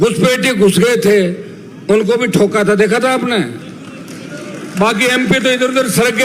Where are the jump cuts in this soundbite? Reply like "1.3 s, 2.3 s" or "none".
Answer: none